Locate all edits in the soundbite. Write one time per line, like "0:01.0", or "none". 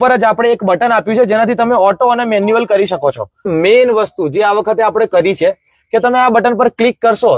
0:03.5